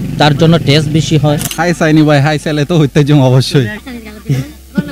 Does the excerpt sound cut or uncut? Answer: cut